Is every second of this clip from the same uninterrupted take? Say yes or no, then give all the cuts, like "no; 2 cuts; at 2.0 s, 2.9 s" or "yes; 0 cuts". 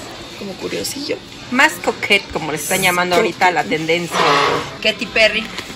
no; 1 cut; at 4.7 s